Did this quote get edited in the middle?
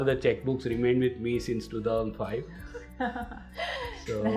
no; 0 cuts

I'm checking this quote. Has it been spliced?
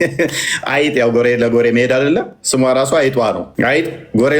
yes; 1 cut; at 3.5 s

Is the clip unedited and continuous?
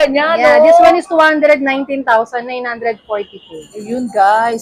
yes; 0 cuts

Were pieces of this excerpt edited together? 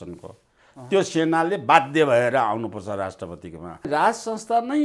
yes; 1 cut; at 3.9 s

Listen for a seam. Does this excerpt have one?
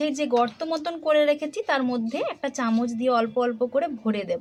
no; 0 cuts

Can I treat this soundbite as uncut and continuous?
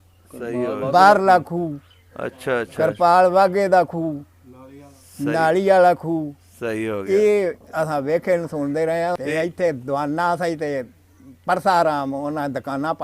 no; 1 cut; at 9.2 s

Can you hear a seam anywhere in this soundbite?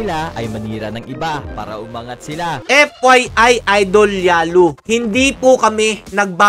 yes; 1 cut; at 2.6 s

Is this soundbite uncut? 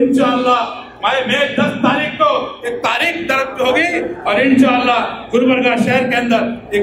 yes; 0 cuts

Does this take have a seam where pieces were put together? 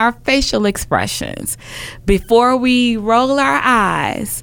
no; 0 cuts

